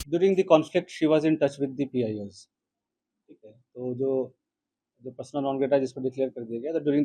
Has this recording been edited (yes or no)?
no